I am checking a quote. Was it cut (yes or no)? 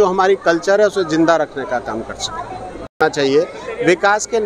yes